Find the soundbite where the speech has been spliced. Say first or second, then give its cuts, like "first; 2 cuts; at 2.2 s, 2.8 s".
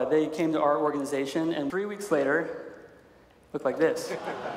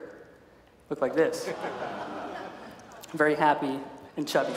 first; 1 cut; at 1.7 s